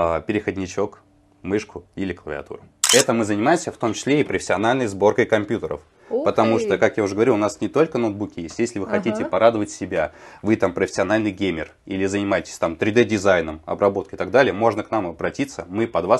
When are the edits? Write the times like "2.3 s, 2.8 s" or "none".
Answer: 2.8 s